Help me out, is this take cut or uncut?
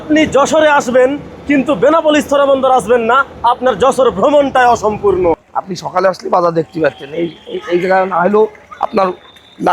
cut